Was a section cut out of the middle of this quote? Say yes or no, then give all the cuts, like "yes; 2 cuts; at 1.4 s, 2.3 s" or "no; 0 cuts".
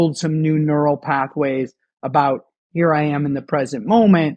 no; 0 cuts